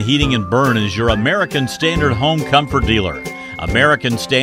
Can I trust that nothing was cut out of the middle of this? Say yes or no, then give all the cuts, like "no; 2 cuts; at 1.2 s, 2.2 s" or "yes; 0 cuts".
yes; 0 cuts